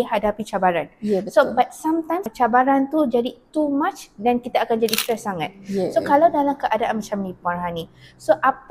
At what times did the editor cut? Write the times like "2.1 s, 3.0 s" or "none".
2.3 s